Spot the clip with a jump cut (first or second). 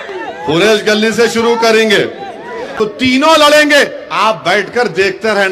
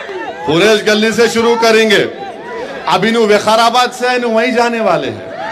first